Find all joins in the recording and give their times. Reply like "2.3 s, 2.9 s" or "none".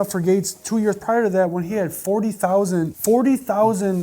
2.9 s